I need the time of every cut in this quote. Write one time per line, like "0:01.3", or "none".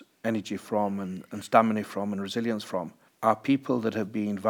0:03.0